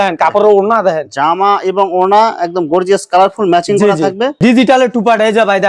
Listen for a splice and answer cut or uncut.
cut